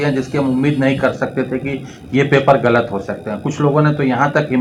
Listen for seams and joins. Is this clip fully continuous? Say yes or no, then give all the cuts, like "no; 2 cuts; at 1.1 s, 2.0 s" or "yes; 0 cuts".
yes; 0 cuts